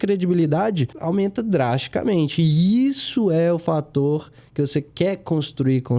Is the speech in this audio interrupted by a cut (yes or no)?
yes